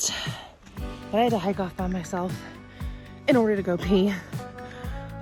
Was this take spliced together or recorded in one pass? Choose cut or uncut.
uncut